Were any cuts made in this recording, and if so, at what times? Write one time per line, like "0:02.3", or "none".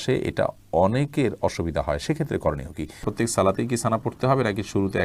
0:03.1